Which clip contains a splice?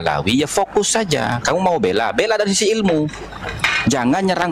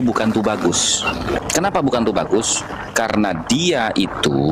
second; 1 cut; at 1.4 s

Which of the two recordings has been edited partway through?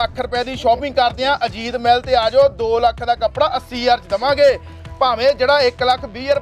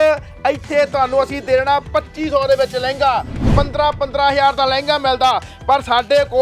second; 1 cut; at 3.4 s

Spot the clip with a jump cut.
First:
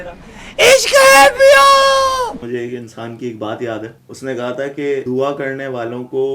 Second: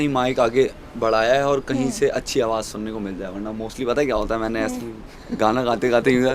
first; 3 cuts; at 2.4 s, 4.0 s, 5.0 s

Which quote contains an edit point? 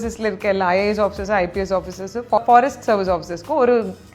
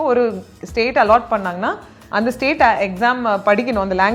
first; 1 cut; at 2.4 s

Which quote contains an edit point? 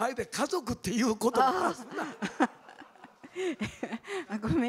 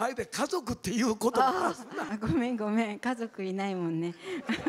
second; 1 cut; at 2.1 s

